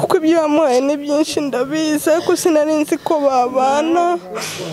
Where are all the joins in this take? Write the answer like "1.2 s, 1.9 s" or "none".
none

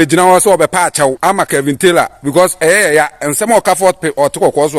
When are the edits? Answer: 1.2 s

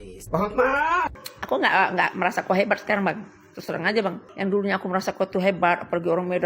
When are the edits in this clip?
1.1 s, 4.2 s

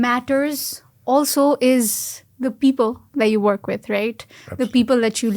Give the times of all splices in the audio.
none

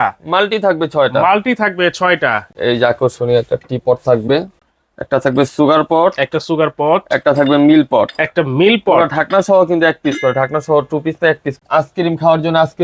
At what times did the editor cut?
2.5 s, 4.6 s, 11.5 s

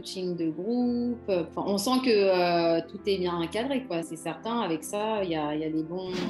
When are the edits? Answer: 1.5 s, 4.1 s

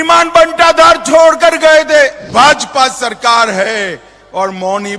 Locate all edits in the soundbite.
2.2 s

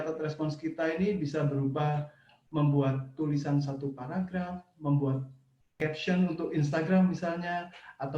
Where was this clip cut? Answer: 5.8 s

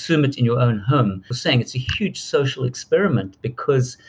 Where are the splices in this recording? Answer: 1.3 s

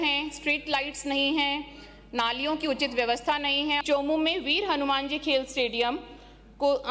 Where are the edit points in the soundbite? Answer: 3.8 s

